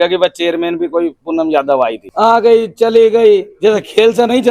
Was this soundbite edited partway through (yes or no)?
yes